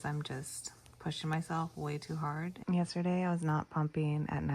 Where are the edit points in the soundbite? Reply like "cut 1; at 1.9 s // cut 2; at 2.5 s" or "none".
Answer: cut 1; at 2.5 s